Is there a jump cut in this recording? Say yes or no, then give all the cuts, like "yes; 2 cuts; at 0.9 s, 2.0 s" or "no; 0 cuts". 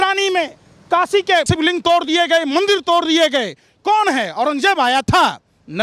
yes; 1 cut; at 1.5 s